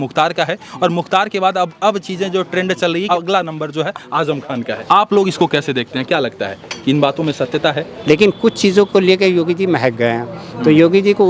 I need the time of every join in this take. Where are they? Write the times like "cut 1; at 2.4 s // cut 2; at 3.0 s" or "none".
cut 1; at 3.1 s // cut 2; at 4.8 s // cut 3; at 7.9 s